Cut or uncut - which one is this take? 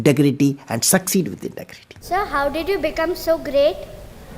cut